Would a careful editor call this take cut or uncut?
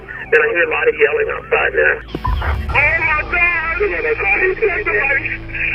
uncut